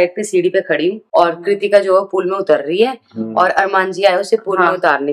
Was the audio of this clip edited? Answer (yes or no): no